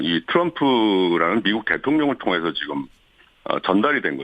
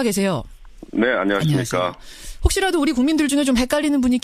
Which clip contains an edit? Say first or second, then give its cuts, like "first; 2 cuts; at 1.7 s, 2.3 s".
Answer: first; 1 cut; at 1.4 s